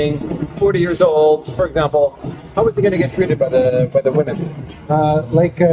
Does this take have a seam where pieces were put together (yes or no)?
no